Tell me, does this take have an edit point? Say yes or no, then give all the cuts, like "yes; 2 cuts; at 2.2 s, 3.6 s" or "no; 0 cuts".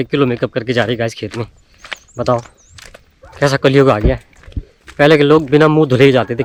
no; 0 cuts